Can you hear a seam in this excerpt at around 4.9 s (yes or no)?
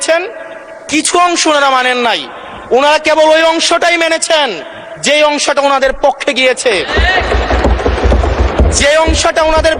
no